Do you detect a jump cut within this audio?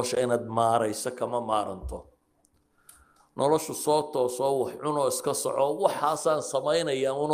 no; 0 cuts

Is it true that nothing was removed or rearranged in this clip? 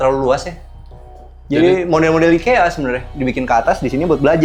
yes; 0 cuts

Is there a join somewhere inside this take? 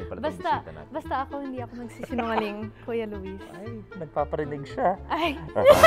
no; 0 cuts

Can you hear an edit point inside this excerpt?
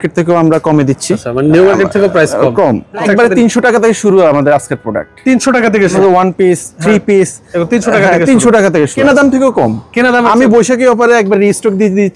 yes; 4 cuts; at 1.3 s, 3.0 s, 6.0 s, 8.9 s

